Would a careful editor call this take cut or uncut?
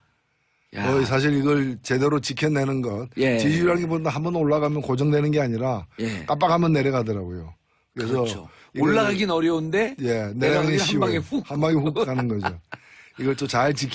uncut